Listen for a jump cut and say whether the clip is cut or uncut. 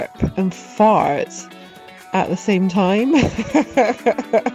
uncut